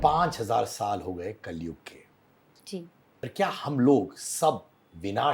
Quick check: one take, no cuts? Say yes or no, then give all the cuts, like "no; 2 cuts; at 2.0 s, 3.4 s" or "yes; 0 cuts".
no; 1 cut; at 2.9 s